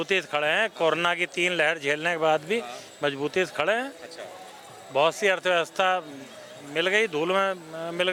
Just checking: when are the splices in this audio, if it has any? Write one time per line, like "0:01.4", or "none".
none